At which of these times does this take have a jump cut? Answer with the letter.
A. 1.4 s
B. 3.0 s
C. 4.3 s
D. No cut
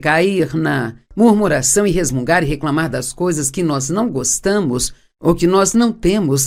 D